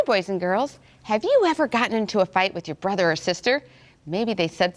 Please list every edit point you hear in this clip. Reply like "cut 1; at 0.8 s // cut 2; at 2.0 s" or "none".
cut 1; at 1.4 s